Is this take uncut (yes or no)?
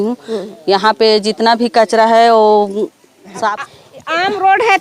no